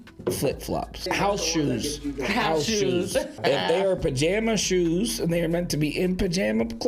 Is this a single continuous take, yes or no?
no